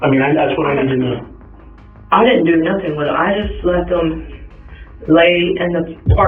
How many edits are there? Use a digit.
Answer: 0